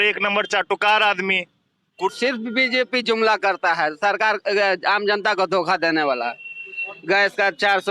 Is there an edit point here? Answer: yes; 1 cut; at 2.1 s

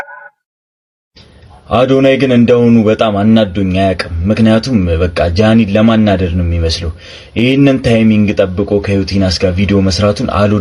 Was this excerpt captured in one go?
yes; 0 cuts

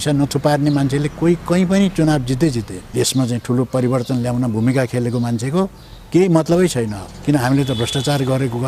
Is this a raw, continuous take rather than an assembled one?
no; 2 cuts; at 2.8 s, 7.1 s

